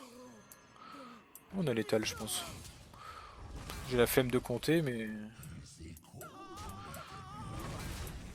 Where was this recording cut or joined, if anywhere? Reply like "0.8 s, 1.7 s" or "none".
none